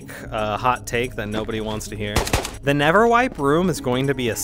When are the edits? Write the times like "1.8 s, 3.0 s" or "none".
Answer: 2.5 s